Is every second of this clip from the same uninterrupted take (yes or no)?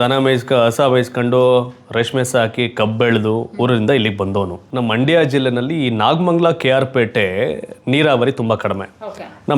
no